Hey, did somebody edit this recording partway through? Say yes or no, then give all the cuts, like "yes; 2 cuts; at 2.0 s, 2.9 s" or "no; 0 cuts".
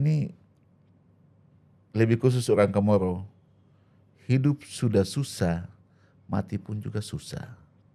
no; 0 cuts